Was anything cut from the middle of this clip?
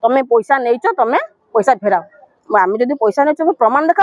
no; 0 cuts

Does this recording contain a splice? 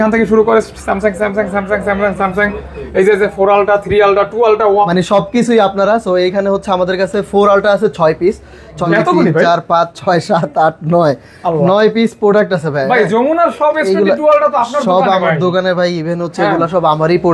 yes; 2 cuts; at 4.9 s, 8.8 s

